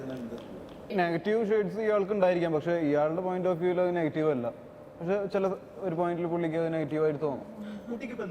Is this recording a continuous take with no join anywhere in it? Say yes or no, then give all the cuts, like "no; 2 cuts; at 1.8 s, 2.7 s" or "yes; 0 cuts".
no; 1 cut; at 0.9 s